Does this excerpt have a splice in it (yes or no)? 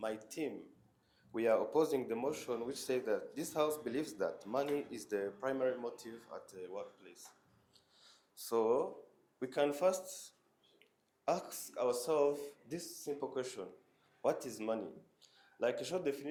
no